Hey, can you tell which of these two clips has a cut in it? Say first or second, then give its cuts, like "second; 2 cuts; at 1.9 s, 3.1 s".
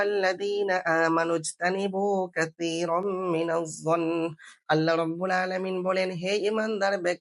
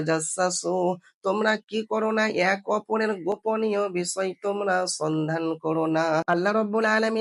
second; 1 cut; at 6.2 s